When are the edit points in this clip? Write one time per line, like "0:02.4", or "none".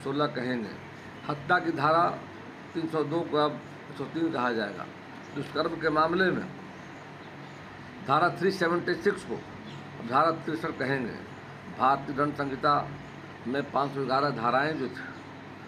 none